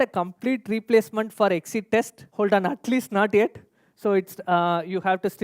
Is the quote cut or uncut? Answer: cut